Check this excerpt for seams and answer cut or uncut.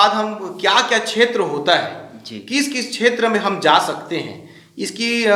uncut